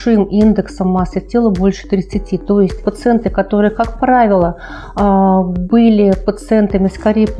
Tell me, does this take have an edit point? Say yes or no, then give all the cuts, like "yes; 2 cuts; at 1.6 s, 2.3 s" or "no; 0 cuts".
yes; 1 cut; at 2.9 s